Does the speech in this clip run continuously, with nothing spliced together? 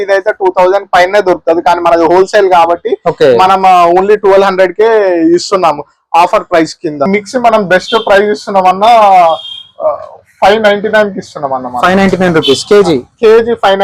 no; 1 cut; at 7.1 s

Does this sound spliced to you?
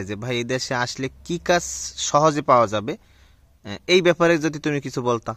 no; 0 cuts

